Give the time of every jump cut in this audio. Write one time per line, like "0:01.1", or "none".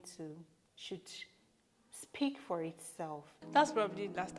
0:03.3

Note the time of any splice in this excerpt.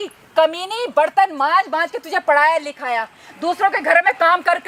none

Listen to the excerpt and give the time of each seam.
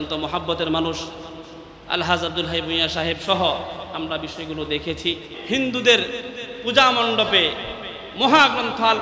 0:05.3

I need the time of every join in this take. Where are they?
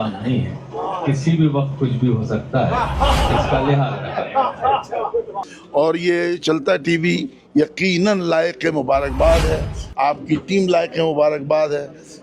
0:05.4

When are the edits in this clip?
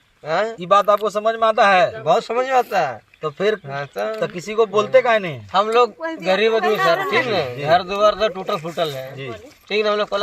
0:05.4

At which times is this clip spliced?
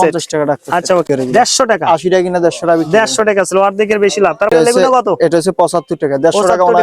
0:01.1
0:04.5

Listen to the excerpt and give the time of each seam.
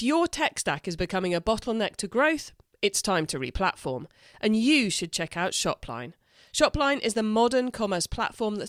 none

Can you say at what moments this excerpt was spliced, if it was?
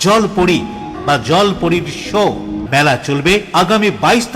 0:00.9
0:02.6

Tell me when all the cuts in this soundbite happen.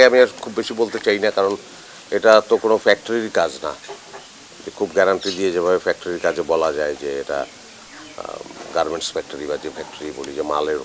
none

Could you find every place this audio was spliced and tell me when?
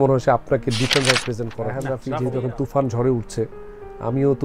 0:01.5

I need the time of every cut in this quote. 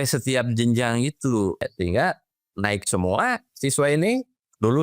0:01.6

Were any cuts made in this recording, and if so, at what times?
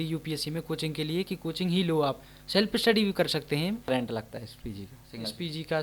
0:03.9

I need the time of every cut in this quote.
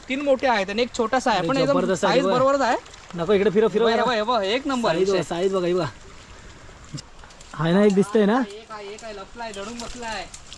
0:07.0

